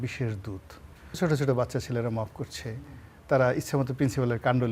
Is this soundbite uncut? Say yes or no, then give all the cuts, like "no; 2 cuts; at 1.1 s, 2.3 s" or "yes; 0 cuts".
no; 1 cut; at 1.2 s